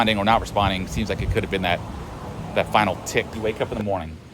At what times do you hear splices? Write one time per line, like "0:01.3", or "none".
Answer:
0:03.3